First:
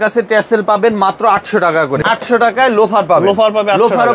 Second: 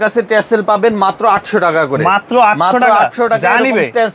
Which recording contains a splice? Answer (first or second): first